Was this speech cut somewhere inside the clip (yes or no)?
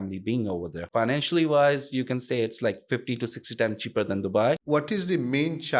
yes